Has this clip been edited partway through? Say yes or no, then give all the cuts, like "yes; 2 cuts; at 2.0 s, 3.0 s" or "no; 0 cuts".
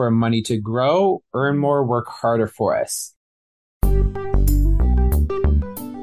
yes; 1 cut; at 3.5 s